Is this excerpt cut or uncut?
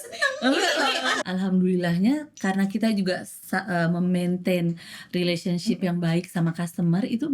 cut